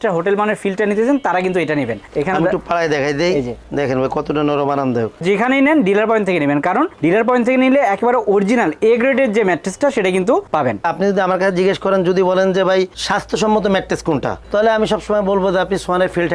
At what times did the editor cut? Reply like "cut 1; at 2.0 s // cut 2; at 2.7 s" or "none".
cut 1; at 5.2 s // cut 2; at 10.8 s

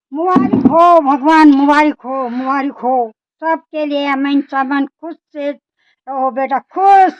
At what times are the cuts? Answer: none

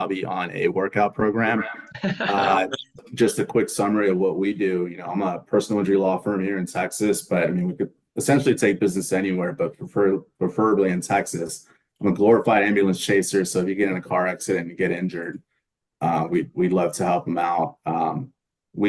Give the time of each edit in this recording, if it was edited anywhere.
cut 1; at 3.0 s

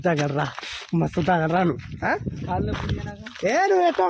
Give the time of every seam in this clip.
none

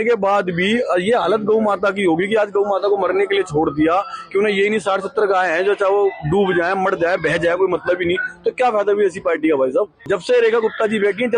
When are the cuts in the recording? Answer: cut 1; at 10.0 s

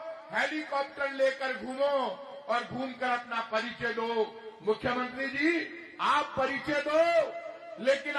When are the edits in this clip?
none

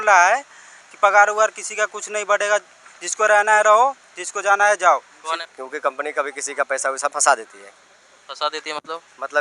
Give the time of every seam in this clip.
cut 1; at 5.4 s

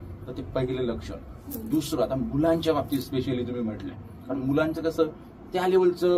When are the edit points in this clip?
none

